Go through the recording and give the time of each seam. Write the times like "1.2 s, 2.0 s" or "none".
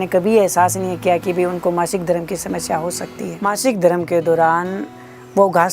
3.3 s